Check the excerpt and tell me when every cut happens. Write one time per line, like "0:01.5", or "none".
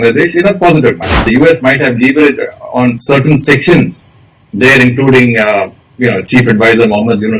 0:01.2